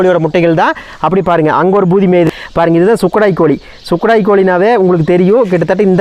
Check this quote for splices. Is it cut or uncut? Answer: cut